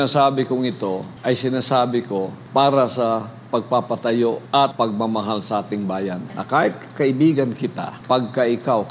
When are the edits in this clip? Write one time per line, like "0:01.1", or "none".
0:01.1
0:02.4
0:04.6
0:06.3
0:07.9